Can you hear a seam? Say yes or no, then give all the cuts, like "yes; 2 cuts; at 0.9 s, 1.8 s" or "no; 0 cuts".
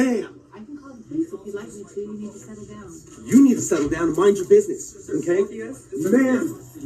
yes; 1 cut; at 3.4 s